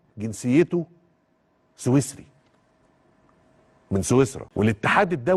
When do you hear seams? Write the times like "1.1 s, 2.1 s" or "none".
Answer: 4.4 s